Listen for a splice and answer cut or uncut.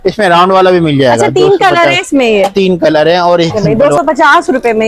cut